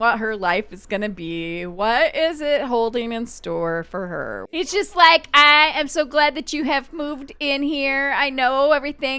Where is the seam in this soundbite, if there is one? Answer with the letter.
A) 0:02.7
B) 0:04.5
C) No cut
B